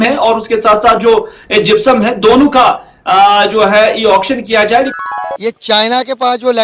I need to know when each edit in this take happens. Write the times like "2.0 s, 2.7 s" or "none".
4.9 s